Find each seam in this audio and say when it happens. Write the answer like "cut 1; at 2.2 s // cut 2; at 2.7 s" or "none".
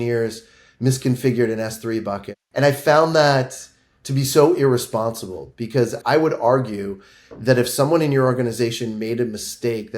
cut 1; at 2.3 s // cut 2; at 6.0 s